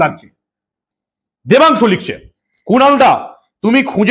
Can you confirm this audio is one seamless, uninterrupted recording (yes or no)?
no